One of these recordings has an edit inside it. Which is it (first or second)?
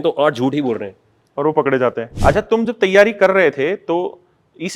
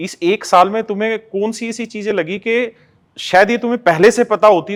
first